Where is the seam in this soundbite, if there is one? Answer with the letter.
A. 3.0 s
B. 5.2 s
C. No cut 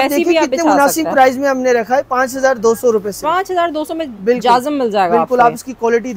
C